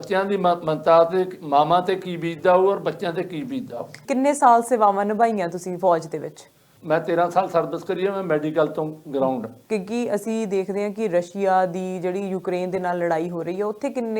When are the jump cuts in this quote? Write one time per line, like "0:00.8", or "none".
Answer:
0:04.0
0:06.7
0:09.5